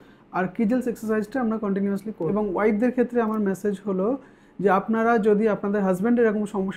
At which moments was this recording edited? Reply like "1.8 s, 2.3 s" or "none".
2.3 s